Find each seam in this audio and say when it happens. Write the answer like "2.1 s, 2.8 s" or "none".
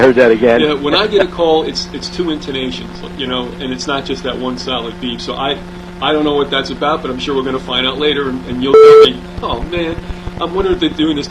none